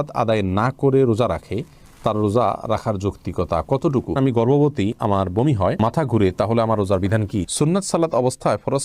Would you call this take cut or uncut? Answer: cut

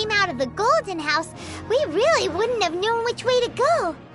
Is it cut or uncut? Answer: uncut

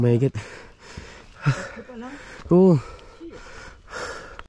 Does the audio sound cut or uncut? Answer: uncut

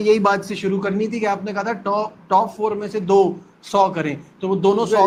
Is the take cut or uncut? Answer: uncut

